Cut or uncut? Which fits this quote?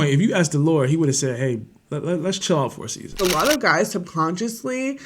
cut